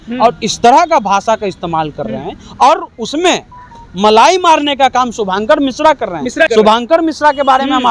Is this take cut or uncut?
cut